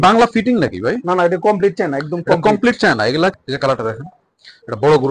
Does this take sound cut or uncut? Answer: cut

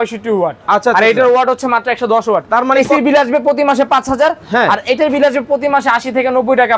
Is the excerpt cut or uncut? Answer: uncut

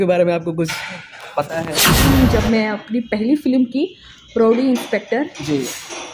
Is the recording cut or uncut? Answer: cut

